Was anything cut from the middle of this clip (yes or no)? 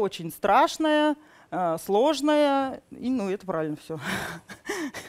no